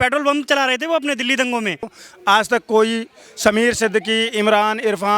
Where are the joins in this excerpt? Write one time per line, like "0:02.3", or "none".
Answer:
0:02.0